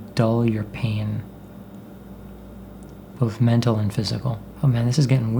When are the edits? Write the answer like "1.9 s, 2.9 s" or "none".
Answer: 4.4 s